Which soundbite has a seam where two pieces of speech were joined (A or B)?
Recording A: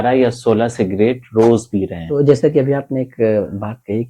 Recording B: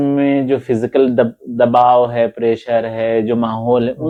A